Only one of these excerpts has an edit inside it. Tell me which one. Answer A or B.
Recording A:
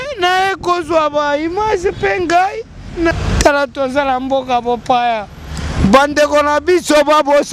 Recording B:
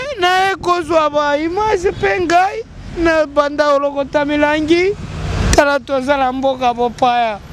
A